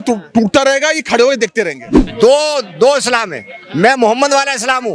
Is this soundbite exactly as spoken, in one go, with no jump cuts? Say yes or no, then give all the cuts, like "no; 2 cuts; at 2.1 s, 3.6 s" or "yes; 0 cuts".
no; 1 cut; at 2.0 s